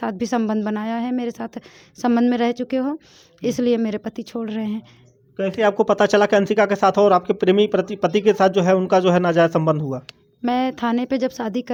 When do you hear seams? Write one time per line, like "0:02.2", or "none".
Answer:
none